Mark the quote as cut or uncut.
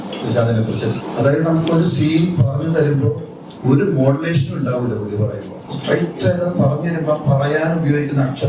cut